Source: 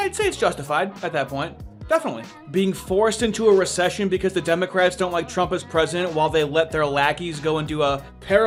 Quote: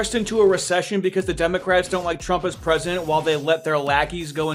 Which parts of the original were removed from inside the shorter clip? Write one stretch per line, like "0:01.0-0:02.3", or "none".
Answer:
none